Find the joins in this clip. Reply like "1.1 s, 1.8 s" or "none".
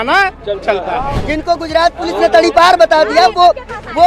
1.2 s